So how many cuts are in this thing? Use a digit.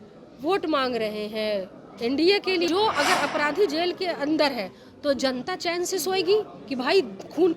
1